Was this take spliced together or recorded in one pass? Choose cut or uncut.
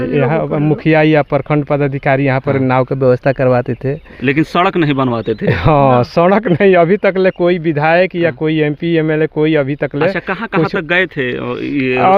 uncut